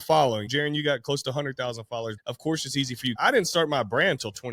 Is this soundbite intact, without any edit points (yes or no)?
no